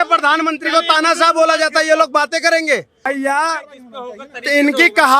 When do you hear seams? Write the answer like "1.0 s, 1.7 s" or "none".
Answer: 3.1 s